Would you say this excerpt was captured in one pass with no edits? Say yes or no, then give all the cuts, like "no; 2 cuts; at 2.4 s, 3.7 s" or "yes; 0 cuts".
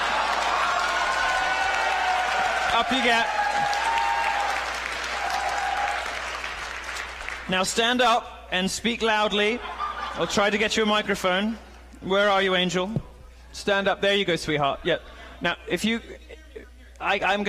no; 1 cut; at 14.5 s